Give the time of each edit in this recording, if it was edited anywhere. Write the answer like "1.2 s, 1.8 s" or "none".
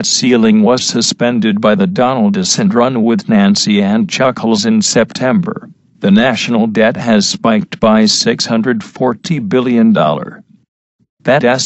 10.5 s